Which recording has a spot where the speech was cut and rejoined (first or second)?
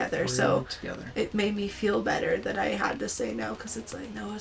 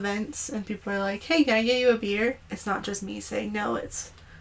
second